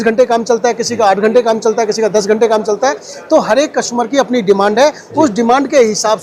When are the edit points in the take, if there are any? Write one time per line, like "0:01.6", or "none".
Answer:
none